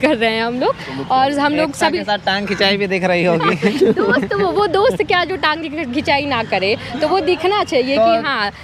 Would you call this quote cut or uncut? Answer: uncut